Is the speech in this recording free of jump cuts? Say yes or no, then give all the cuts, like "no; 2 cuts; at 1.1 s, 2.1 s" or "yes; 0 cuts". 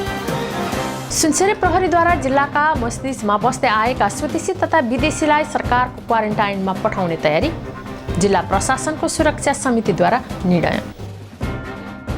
no; 1 cut; at 1.0 s